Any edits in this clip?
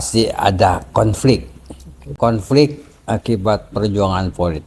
yes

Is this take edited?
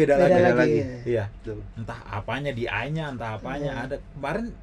no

